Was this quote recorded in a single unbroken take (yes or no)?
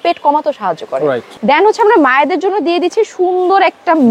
no